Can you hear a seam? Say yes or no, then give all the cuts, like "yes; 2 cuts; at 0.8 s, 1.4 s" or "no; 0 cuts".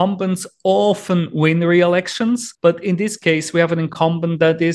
no; 0 cuts